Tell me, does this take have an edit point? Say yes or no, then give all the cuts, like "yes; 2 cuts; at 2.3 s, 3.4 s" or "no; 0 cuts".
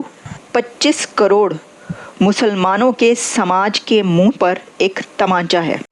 no; 0 cuts